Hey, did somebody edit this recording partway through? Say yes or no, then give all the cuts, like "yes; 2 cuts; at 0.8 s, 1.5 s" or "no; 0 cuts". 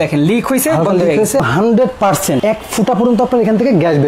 yes; 2 cuts; at 1.4 s, 2.4 s